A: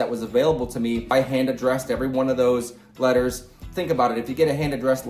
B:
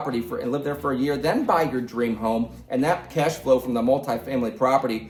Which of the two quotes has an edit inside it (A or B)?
A